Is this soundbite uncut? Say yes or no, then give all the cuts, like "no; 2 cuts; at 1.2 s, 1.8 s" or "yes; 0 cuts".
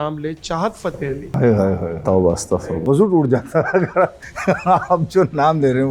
no; 2 cuts; at 1.3 s, 2.8 s